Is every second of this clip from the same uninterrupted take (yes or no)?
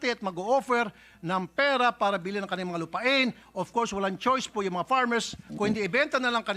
yes